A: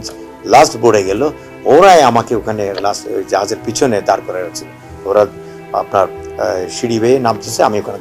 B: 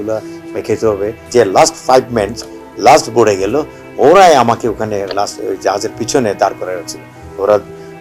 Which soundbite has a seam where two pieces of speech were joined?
B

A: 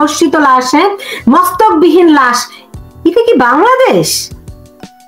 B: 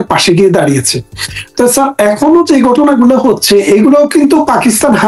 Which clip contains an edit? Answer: A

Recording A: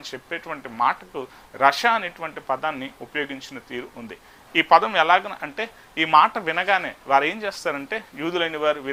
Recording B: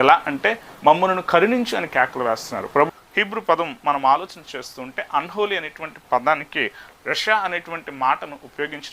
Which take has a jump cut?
B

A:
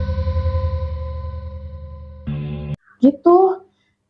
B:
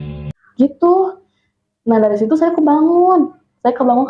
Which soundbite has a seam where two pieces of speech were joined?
A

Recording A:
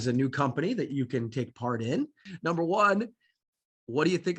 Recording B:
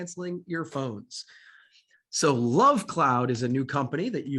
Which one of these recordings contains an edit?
A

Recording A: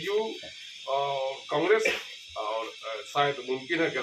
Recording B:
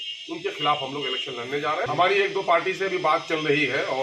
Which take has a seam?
B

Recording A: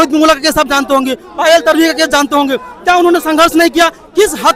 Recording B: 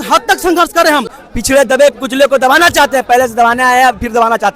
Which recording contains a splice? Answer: B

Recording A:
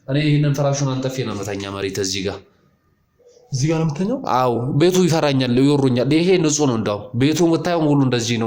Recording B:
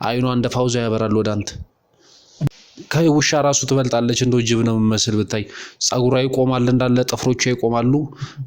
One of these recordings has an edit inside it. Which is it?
B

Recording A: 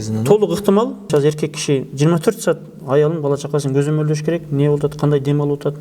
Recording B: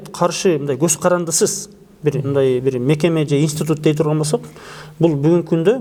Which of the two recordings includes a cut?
A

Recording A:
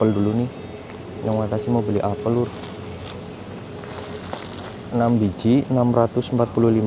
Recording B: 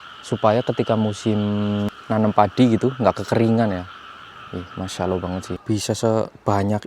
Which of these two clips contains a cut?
B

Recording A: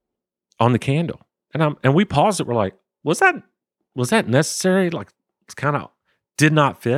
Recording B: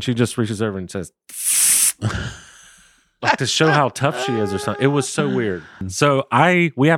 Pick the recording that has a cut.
B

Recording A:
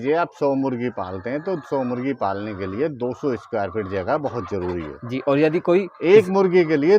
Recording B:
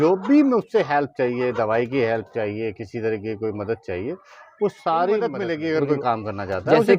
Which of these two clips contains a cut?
B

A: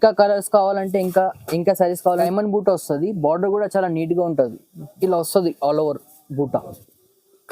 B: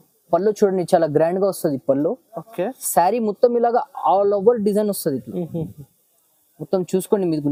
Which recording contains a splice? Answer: A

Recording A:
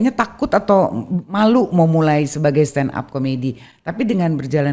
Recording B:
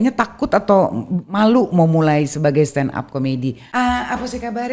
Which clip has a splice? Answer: B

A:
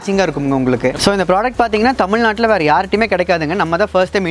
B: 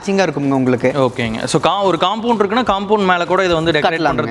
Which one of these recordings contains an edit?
A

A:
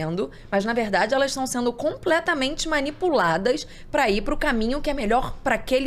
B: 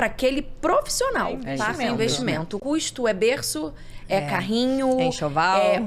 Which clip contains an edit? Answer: B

